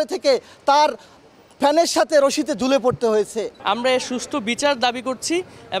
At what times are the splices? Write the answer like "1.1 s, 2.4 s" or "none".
3.5 s